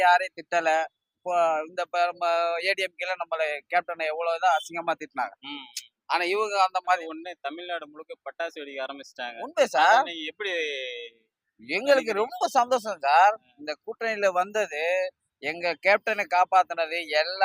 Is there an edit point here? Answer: yes; 1 cut; at 7.0 s

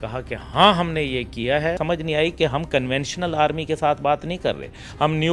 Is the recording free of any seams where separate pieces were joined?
no; 1 cut; at 1.8 s

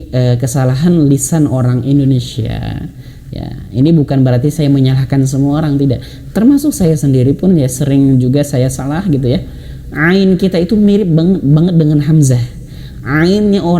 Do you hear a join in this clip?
no; 0 cuts

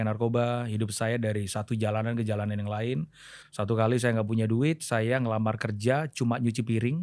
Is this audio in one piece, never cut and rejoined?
yes; 0 cuts

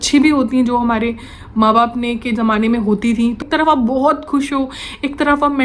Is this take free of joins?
no; 1 cut; at 3.4 s

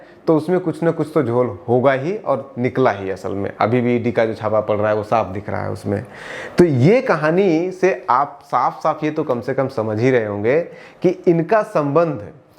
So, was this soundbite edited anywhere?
no; 0 cuts

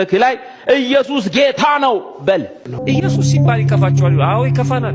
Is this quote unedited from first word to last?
no; 1 cut; at 2.7 s

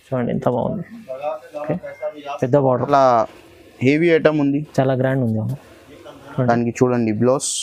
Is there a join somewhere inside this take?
yes; 1 cut; at 2.9 s

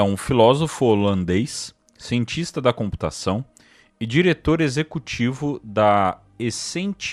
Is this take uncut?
yes; 0 cuts

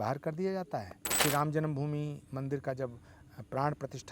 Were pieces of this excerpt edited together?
yes; 1 cut; at 1.1 s

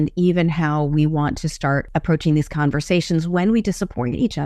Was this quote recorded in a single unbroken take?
no; 1 cut; at 1.9 s

